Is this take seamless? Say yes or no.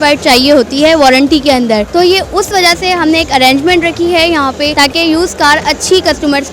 no